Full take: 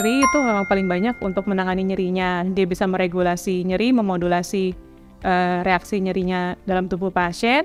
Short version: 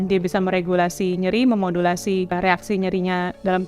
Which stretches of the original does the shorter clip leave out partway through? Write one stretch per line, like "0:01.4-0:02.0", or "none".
0:04.8-0:05.6